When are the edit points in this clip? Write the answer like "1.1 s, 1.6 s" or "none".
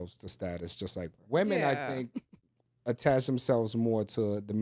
1.2 s